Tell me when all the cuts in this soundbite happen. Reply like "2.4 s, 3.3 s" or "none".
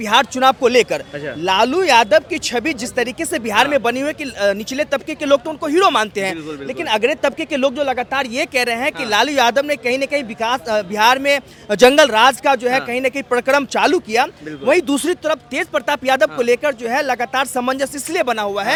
none